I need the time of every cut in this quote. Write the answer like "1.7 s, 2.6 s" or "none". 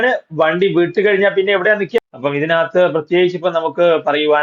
2.0 s